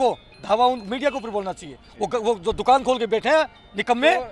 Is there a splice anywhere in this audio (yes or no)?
no